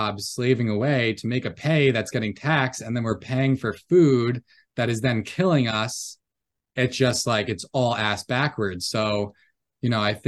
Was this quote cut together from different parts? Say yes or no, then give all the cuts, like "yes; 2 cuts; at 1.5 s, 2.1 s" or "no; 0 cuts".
no; 0 cuts